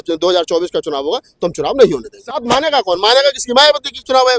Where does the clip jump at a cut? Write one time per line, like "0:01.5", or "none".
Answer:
0:02.4